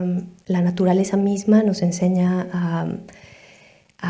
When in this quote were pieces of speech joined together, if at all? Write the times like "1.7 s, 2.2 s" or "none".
none